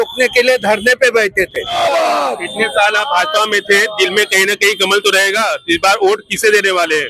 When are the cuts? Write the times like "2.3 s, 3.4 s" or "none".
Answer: 1.8 s